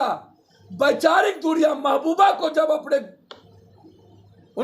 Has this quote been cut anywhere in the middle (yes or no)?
no